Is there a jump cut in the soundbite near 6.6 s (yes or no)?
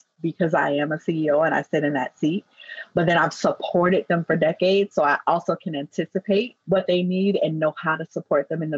yes